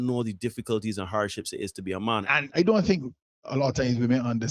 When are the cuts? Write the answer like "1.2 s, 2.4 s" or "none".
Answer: 2.3 s